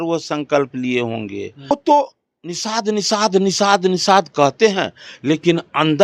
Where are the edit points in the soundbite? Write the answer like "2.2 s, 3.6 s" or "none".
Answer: 1.7 s